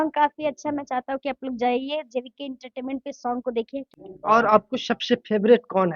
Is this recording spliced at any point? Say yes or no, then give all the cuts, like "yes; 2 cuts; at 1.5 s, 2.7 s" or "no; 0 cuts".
yes; 1 cut; at 3.9 s